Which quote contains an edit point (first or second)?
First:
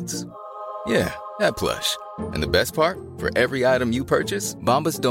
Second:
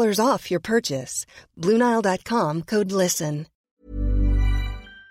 second